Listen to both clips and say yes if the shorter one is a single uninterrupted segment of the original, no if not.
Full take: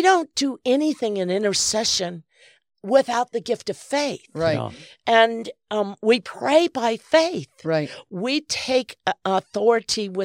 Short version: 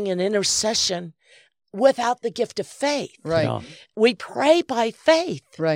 no